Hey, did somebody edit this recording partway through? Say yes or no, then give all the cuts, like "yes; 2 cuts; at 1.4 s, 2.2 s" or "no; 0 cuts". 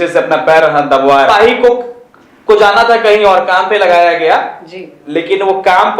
yes; 1 cut; at 1.3 s